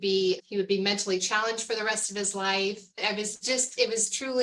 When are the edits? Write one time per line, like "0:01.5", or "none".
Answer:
0:03.0